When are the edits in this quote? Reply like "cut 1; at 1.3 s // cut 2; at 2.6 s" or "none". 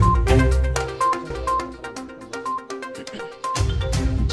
cut 1; at 0.9 s

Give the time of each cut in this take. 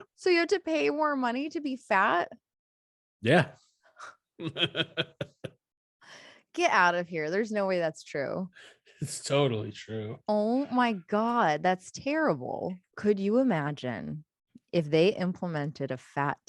cut 1; at 12.8 s

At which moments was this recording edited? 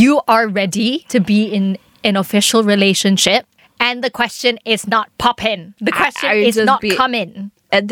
cut 1; at 1.0 s // cut 2; at 5.7 s

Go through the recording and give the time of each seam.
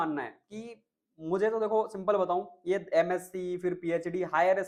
none

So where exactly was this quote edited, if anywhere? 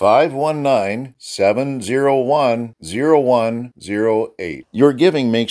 none

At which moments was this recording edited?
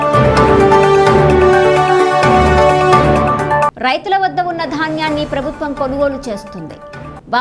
cut 1; at 1.0 s

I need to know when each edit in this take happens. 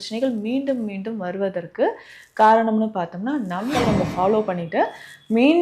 cut 1; at 3.7 s

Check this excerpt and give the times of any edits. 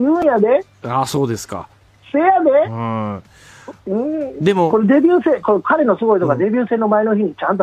cut 1; at 6.7 s

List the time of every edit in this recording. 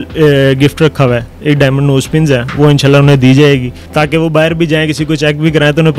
cut 1; at 1.3 s // cut 2; at 3.8 s

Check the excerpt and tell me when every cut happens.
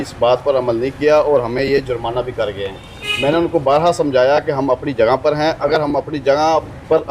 none

